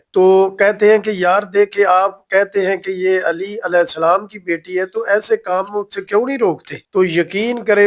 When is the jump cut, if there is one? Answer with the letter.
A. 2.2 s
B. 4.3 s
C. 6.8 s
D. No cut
D